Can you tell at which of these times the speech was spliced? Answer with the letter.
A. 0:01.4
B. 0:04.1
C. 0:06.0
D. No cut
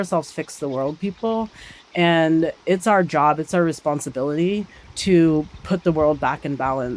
D